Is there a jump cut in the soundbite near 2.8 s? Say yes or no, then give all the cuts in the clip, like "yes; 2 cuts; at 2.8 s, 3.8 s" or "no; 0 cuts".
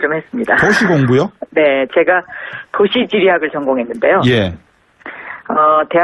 yes; 1 cut; at 2.8 s